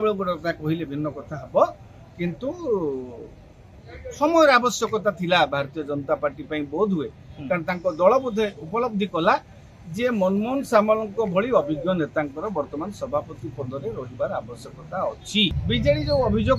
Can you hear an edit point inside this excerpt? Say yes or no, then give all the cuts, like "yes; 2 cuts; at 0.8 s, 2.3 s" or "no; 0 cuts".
yes; 1 cut; at 15.6 s